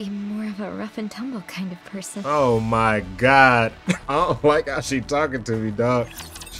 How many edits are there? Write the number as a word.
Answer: one